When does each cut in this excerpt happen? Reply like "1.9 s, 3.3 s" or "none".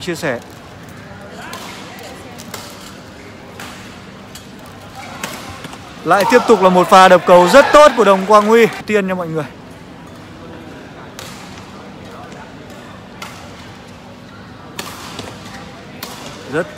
8.8 s

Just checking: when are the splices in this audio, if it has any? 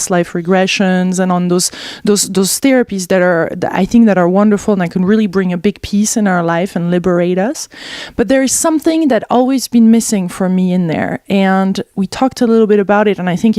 8.3 s

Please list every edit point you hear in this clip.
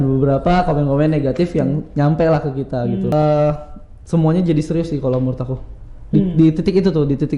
3.1 s

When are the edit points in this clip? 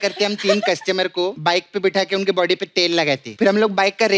1.4 s, 3.3 s

